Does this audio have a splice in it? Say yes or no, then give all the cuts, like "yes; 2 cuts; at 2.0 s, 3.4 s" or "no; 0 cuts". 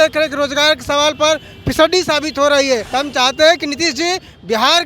yes; 1 cut; at 2.9 s